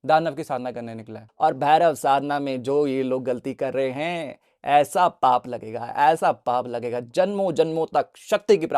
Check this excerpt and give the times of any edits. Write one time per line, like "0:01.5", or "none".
0:01.2